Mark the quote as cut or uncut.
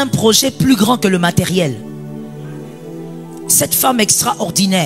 uncut